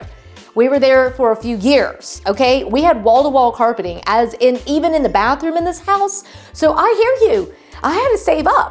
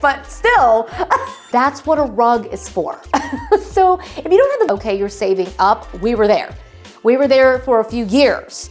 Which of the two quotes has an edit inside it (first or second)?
second